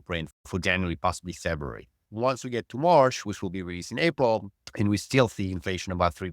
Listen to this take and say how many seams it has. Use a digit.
2